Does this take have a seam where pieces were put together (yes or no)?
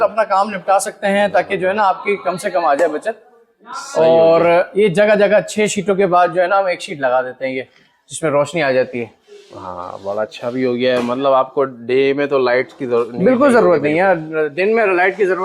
no